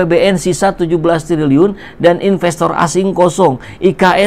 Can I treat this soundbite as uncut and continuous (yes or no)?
yes